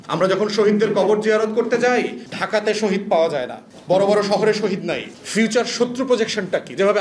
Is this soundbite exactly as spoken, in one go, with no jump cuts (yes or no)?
no